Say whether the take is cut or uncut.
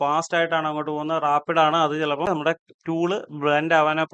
cut